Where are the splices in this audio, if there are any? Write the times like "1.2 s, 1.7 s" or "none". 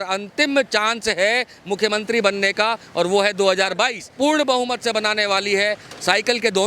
4.0 s